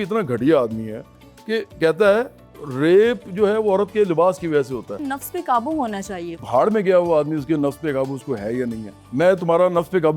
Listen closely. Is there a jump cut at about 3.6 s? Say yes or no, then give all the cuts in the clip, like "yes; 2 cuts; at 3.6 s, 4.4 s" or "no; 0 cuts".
no; 3 cuts; at 4.9 s, 6.4 s, 8.9 s